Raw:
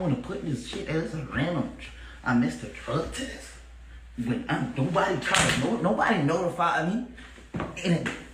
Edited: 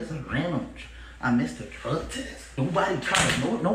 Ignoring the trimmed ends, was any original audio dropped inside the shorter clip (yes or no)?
yes